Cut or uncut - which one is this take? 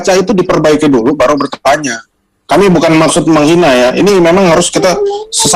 uncut